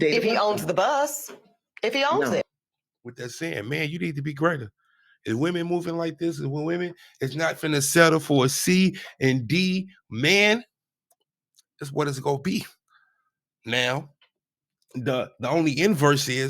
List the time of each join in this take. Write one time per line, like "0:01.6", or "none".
0:02.5